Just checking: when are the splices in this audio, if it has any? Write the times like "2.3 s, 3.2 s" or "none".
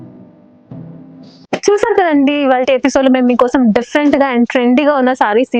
1.3 s